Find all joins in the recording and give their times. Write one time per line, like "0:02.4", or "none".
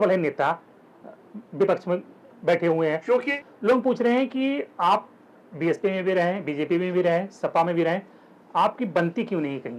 0:03.4